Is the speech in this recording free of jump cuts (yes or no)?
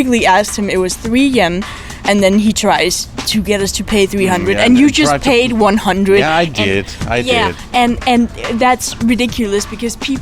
yes